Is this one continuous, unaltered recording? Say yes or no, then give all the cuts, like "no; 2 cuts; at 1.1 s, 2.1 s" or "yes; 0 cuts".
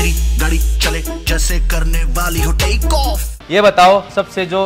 no; 1 cut; at 3.4 s